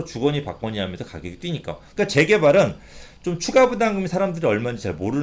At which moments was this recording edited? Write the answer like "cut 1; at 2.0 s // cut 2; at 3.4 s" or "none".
cut 1; at 1.8 s